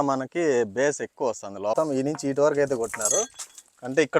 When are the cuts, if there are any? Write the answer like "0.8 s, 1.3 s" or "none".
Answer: 1.7 s